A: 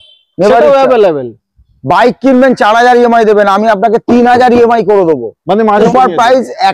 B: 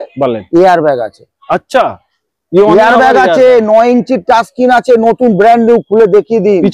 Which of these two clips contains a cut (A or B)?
A